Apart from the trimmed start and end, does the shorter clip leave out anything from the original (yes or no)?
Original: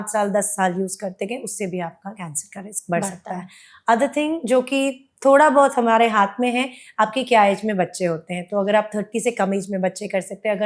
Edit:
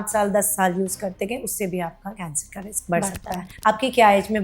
yes